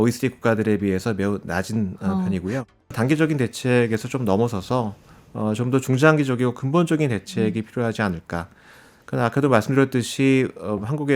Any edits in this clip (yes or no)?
yes